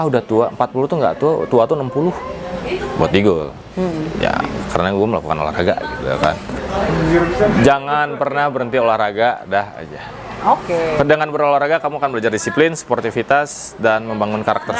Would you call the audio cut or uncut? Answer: uncut